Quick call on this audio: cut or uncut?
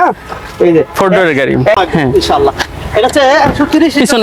cut